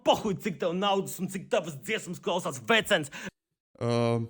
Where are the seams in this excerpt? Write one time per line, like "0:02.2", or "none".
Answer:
none